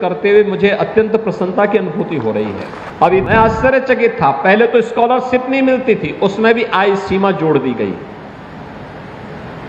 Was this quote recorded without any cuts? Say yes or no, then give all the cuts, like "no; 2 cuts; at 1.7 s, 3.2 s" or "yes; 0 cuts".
no; 1 cut; at 3.3 s